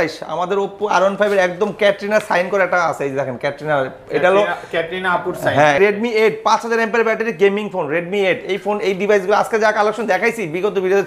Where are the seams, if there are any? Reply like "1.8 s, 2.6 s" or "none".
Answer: 5.8 s